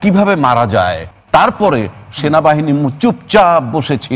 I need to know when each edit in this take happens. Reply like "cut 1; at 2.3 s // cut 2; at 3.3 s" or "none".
cut 1; at 1.1 s